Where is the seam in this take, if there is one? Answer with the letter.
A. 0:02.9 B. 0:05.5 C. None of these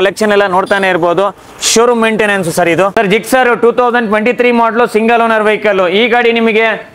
A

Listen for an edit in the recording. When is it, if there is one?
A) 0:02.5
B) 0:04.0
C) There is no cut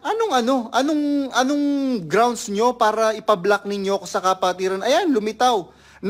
C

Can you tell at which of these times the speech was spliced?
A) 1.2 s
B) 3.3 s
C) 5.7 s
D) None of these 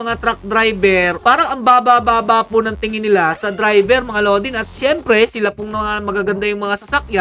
A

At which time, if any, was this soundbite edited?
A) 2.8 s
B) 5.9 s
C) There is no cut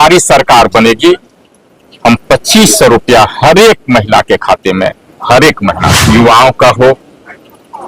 B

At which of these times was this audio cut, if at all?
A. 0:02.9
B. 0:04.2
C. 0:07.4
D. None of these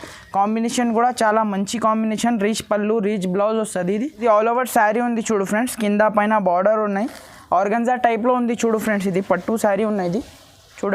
B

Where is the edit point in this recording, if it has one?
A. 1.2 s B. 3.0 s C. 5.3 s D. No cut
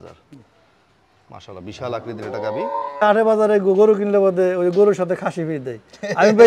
B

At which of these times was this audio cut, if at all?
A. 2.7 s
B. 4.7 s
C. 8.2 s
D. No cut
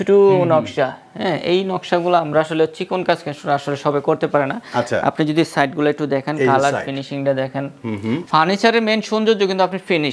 C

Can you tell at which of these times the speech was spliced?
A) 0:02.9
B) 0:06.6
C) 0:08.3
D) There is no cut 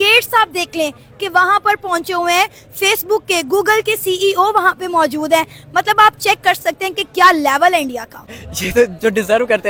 D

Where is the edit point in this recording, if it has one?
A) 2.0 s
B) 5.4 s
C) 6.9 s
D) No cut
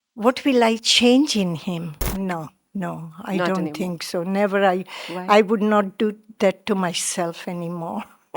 A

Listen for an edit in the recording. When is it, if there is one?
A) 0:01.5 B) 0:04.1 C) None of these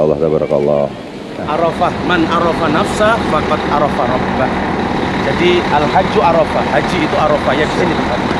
A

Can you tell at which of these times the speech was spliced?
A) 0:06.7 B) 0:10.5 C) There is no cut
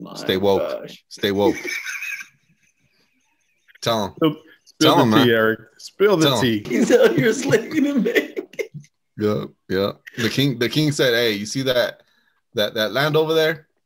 A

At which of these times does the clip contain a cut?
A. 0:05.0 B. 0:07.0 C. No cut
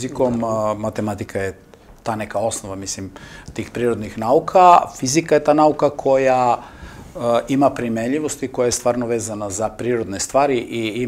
C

